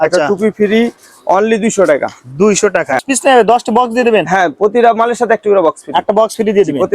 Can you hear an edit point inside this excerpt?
yes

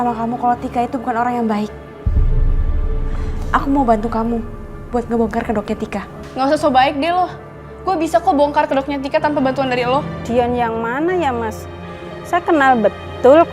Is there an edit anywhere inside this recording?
yes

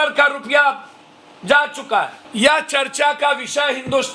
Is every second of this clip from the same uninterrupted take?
yes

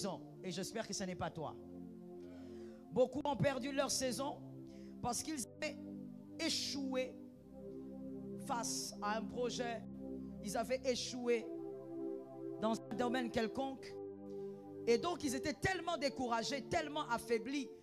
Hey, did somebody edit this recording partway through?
no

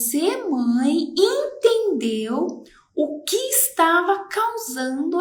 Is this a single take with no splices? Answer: yes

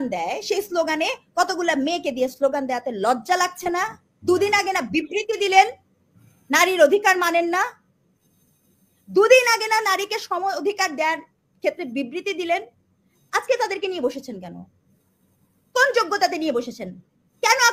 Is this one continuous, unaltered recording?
yes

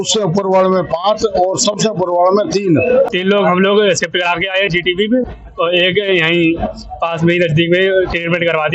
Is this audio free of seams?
no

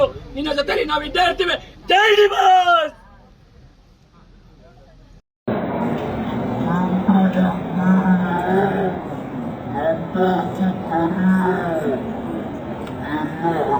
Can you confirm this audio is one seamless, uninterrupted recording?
no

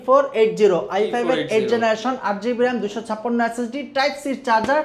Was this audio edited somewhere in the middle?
no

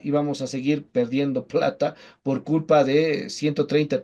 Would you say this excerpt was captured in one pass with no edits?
yes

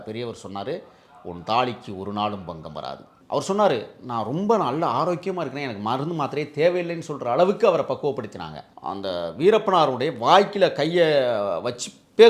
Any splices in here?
yes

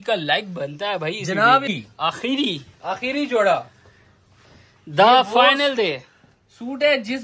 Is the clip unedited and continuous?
no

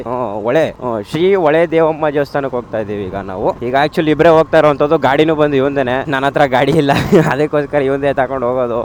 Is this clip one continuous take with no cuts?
yes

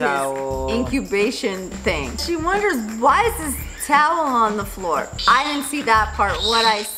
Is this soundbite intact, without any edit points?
no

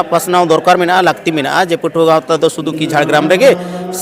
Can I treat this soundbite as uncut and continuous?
yes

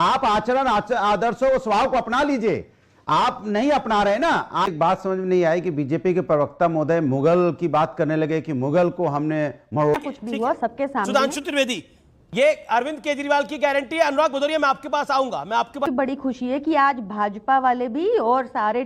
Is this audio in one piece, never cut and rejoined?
no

